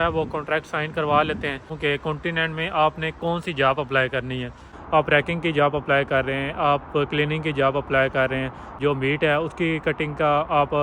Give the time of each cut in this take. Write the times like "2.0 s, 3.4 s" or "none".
1.7 s, 4.7 s, 8.7 s